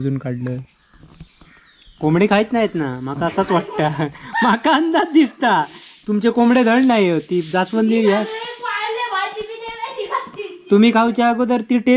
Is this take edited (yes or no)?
no